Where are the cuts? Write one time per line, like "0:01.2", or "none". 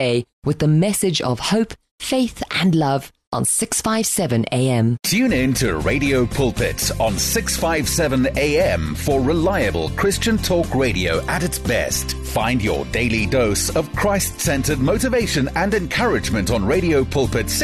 0:05.0